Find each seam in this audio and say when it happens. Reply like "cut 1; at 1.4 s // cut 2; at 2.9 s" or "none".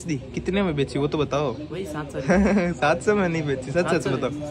none

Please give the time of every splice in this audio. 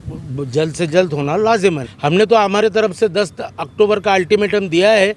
cut 1; at 1.9 s

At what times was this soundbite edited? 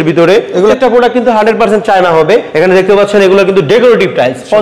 cut 1; at 0.7 s // cut 2; at 2.5 s

